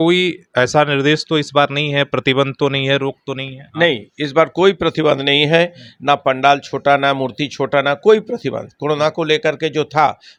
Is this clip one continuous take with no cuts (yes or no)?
yes